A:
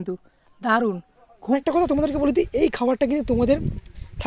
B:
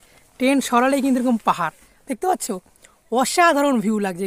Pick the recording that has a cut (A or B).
A